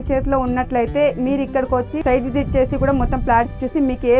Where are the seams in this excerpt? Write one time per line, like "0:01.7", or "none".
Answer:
0:02.0